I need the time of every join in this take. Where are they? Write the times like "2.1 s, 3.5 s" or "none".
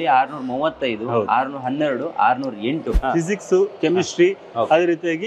3.0 s